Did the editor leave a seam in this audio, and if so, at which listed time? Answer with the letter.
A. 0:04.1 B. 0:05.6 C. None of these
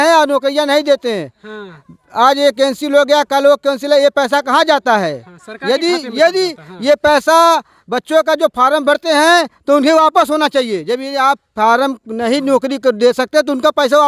C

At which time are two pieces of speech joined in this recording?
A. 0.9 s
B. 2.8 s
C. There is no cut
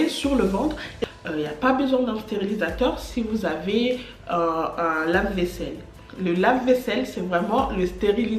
A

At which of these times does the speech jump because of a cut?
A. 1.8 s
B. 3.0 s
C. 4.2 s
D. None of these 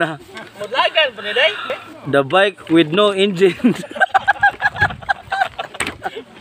A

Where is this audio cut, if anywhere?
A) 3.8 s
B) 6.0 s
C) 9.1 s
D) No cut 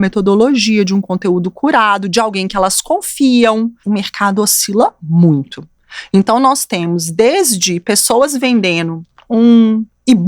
A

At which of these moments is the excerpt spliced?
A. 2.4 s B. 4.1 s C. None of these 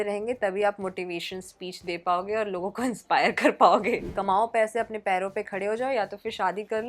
B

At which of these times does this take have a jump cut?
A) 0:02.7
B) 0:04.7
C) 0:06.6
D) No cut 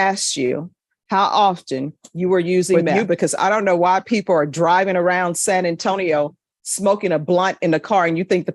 A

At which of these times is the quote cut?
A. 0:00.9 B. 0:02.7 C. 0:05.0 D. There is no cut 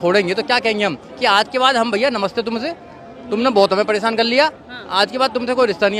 D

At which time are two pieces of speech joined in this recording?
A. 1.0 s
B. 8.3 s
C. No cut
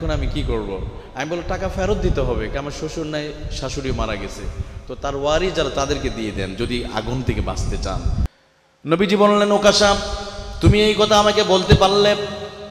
B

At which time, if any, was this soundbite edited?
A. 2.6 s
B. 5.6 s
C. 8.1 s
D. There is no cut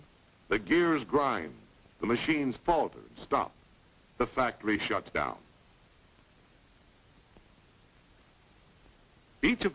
A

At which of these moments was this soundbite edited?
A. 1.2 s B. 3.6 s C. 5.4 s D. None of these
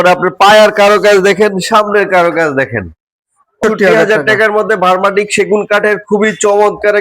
B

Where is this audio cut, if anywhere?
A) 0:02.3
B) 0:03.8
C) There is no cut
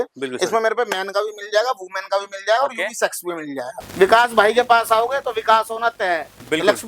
B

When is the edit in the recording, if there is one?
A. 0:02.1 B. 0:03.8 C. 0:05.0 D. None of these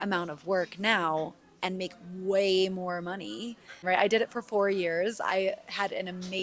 B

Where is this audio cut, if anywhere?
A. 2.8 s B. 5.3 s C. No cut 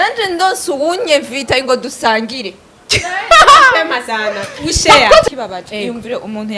B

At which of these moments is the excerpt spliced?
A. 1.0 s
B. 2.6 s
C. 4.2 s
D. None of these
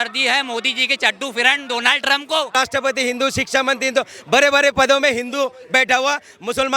B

